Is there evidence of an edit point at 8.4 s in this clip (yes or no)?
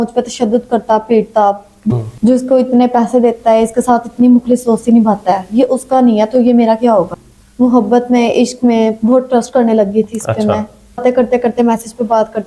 no